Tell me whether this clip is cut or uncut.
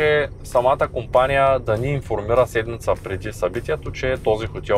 uncut